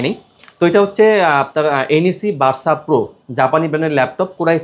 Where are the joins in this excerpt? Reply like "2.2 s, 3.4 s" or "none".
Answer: none